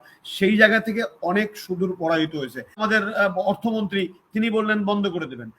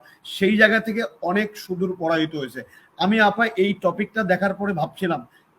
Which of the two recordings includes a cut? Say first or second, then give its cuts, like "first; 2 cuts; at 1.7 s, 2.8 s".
first; 1 cut; at 2.8 s